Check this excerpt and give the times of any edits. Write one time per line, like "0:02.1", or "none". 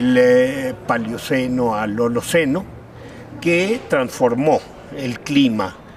none